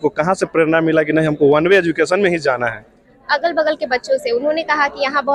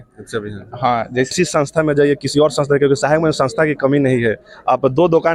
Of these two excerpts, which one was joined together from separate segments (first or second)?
second